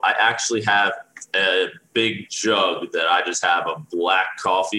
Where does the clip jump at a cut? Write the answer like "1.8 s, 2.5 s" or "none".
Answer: none